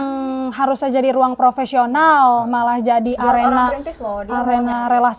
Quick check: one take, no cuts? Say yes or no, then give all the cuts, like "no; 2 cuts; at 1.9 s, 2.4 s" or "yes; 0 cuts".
yes; 0 cuts